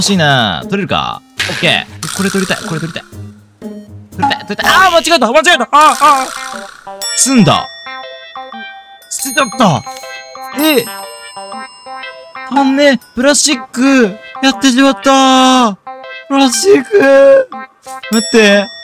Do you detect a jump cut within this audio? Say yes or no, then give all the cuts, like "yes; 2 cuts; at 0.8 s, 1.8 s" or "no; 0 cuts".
no; 0 cuts